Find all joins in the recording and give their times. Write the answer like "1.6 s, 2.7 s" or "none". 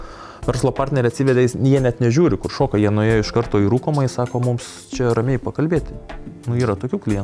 none

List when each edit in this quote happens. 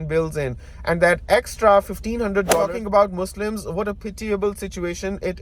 2.7 s

